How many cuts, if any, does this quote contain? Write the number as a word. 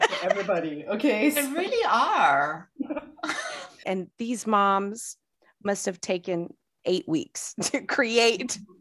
one